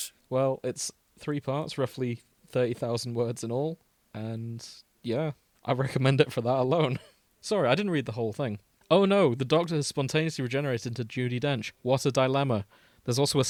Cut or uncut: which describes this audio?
uncut